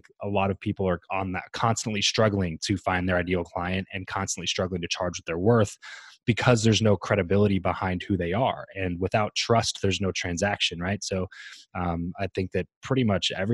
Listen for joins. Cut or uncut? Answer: uncut